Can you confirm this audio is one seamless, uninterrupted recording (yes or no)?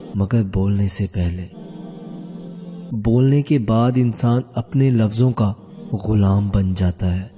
no